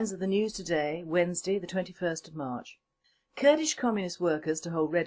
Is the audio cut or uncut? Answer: cut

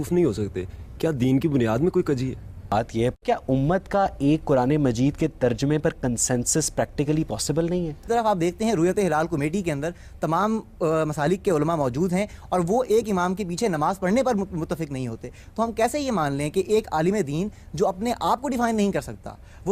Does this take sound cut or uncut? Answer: cut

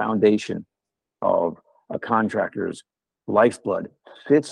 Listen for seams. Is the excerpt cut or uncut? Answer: uncut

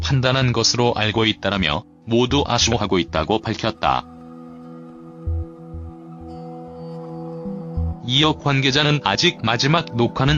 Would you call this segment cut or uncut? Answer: uncut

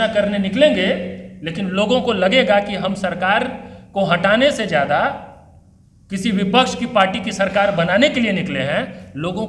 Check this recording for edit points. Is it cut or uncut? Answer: uncut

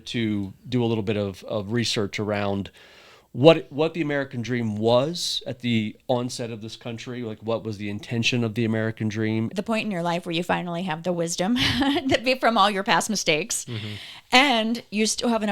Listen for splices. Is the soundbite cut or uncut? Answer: cut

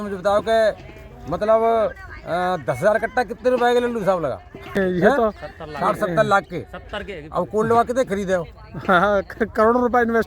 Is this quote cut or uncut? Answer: cut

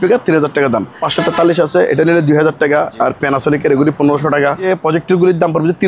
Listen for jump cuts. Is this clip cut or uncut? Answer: cut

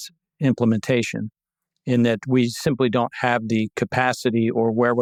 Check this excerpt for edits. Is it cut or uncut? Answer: uncut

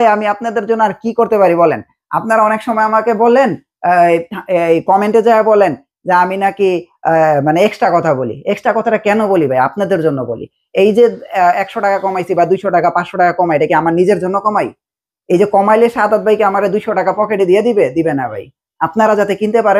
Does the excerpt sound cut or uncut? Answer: uncut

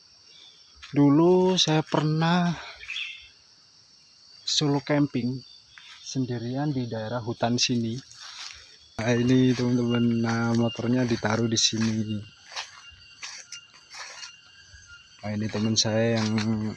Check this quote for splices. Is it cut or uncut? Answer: cut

